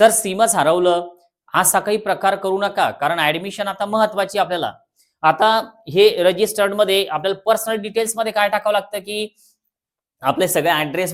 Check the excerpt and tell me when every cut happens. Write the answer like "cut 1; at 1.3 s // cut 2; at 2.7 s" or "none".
none